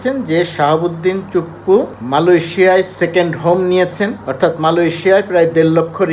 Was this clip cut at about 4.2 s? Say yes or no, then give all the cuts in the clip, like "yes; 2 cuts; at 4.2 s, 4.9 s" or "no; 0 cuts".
yes; 2 cuts; at 2.0 s, 4.2 s